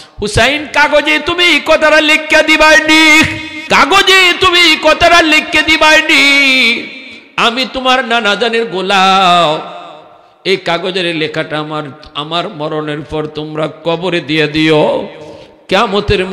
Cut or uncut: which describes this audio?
cut